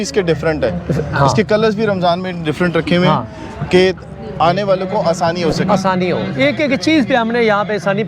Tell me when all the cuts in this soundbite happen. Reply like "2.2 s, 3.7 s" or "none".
none